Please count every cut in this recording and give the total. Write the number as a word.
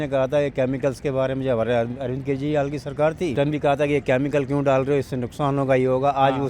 one